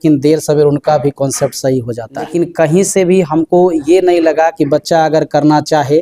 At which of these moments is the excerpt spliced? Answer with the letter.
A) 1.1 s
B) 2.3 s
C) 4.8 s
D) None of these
B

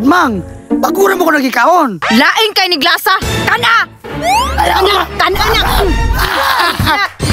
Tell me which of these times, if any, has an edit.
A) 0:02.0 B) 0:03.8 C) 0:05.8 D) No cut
A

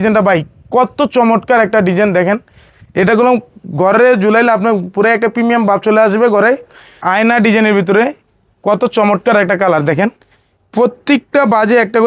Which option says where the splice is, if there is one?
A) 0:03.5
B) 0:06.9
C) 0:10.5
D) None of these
B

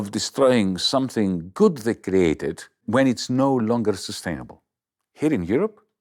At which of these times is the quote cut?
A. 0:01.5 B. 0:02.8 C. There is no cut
B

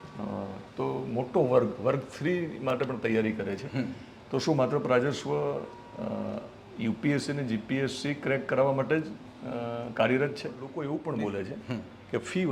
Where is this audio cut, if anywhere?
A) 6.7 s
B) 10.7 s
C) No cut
B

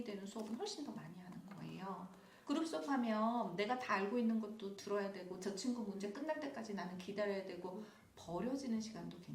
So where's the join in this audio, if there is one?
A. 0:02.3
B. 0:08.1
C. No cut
A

